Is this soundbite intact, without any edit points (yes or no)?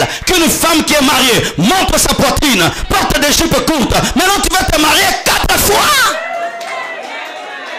yes